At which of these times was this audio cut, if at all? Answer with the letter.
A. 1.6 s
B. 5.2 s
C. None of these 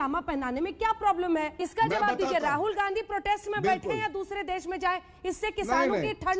A